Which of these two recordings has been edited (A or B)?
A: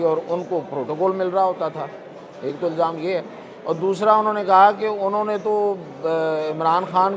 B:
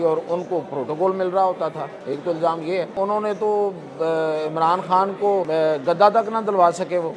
B